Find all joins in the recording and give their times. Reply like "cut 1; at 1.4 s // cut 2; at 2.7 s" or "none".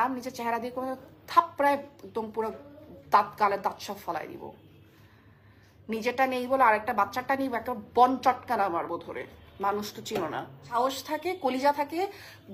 cut 1; at 10.6 s